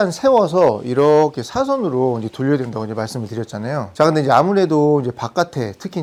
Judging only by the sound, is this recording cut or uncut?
uncut